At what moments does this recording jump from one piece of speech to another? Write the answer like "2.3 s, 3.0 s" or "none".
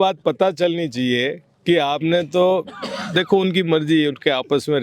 none